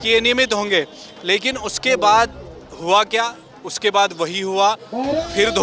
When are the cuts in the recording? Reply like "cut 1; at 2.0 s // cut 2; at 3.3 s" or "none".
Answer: none